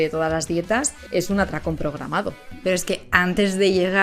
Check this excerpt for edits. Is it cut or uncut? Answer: cut